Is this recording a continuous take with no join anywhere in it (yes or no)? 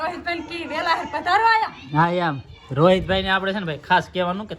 yes